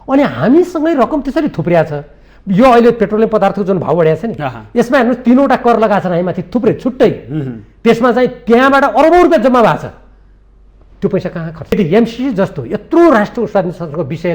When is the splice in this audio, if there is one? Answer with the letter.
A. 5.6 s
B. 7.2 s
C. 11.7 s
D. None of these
C